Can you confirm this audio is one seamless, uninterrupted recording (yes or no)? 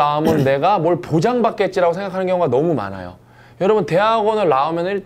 yes